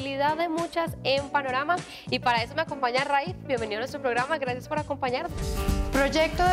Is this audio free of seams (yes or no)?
no